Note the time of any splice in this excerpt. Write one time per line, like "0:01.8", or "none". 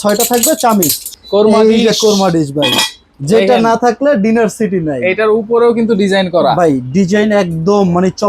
0:01.1